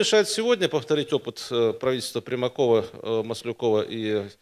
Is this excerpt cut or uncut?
uncut